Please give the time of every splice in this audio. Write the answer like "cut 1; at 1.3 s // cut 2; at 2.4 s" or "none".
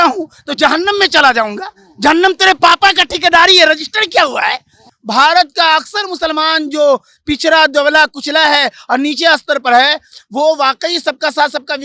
cut 1; at 4.9 s